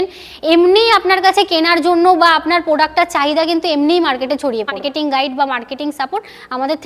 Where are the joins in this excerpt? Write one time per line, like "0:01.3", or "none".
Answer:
0:04.8